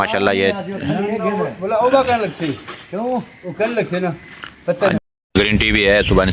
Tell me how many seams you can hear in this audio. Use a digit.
1